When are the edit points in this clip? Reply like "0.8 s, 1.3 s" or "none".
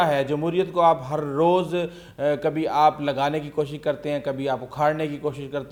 none